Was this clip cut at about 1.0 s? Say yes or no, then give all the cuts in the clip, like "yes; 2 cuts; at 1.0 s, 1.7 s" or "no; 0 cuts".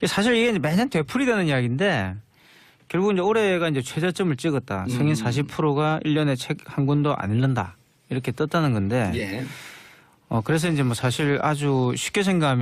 no; 1 cut; at 3.3 s